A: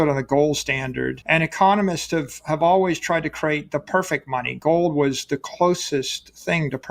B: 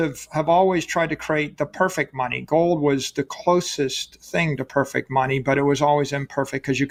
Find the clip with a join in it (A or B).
A